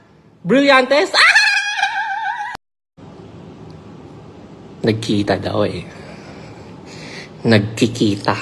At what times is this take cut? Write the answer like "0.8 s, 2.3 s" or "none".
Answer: 2.5 s